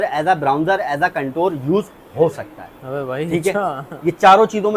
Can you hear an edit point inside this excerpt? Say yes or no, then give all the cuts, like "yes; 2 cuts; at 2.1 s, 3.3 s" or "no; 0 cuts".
no; 0 cuts